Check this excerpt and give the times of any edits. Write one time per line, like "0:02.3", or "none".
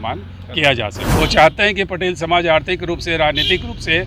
0:01.0